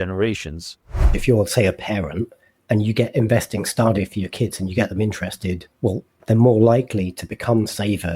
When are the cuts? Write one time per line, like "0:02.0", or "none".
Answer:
0:01.1
0:05.7